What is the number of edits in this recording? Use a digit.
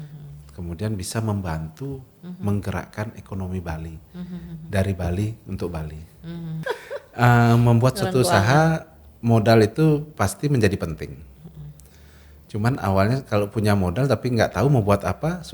1